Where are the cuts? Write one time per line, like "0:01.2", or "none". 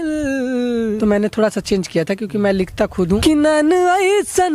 0:01.0
0:03.2